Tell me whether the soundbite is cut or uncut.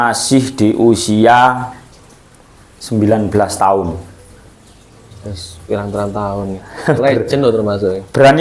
cut